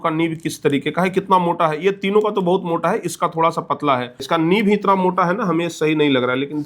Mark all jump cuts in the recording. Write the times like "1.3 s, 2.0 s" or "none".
4.2 s